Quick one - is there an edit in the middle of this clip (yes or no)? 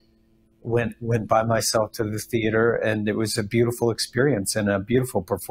no